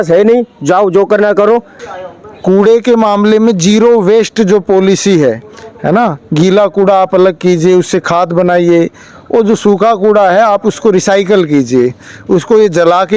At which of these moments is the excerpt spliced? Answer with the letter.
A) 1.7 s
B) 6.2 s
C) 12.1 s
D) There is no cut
A